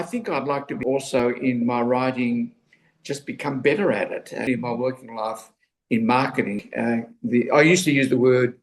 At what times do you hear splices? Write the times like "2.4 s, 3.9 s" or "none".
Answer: 1.2 s, 4.4 s, 6.7 s